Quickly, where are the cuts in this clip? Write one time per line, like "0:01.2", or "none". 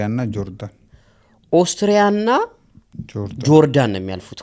none